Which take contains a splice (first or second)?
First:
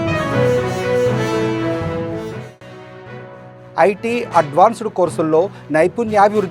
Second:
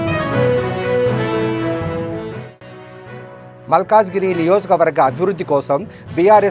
first